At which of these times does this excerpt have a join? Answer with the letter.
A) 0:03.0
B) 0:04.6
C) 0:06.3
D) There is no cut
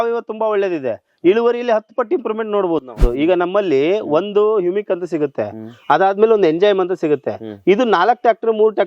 A